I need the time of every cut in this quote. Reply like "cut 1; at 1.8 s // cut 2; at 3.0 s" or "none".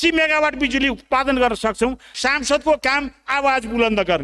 cut 1; at 2.1 s